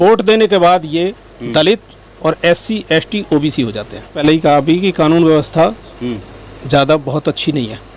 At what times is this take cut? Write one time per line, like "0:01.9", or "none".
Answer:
0:04.2

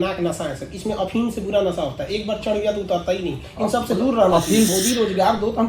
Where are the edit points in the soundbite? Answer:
0:04.7

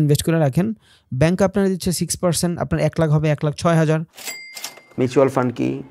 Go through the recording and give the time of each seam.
0:04.6

